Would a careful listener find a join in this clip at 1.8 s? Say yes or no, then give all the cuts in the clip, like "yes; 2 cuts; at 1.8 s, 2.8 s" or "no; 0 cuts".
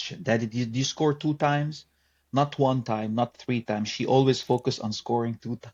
no; 0 cuts